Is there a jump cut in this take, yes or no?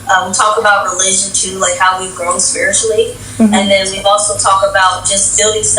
no